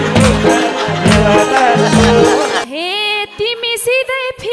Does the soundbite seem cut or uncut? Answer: cut